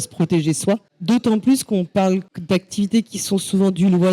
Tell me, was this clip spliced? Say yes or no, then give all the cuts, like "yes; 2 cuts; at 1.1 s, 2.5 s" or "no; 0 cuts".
yes; 2 cuts; at 0.9 s, 2.3 s